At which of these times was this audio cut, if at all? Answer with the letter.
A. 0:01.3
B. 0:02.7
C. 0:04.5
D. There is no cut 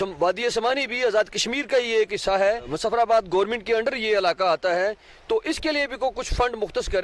B